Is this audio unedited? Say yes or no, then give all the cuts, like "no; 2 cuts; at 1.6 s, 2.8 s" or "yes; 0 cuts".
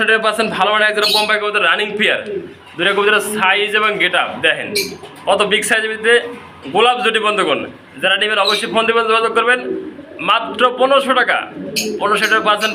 yes; 0 cuts